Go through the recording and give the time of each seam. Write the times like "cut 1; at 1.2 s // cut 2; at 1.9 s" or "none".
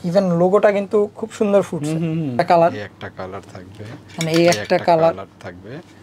cut 1; at 2.4 s